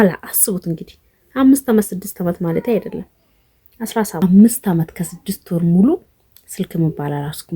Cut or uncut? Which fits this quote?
cut